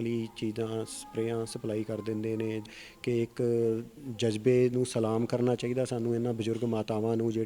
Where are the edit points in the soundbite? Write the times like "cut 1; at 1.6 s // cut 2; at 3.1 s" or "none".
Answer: cut 1; at 2.6 s